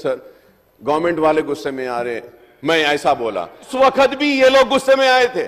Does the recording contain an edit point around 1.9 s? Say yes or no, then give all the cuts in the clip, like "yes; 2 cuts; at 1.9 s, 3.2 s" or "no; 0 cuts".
no; 1 cut; at 3.7 s